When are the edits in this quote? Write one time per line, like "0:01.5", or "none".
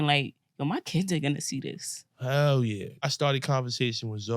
0:03.0